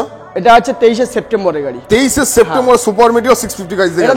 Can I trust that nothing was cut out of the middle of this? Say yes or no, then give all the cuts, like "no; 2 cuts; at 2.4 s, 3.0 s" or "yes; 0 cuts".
yes; 0 cuts